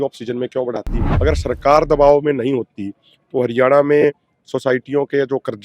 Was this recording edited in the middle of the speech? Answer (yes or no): yes